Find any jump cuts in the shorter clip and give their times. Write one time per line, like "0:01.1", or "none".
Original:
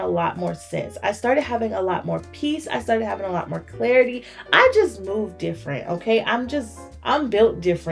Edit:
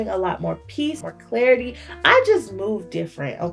0:01.0